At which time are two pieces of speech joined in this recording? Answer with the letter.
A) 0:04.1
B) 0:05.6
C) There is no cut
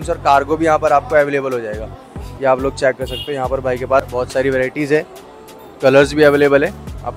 A